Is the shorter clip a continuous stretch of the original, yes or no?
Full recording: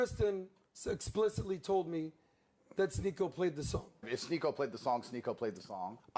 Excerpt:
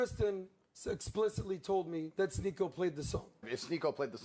no